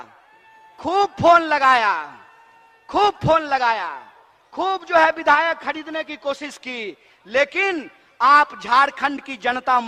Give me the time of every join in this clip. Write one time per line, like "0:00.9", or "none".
none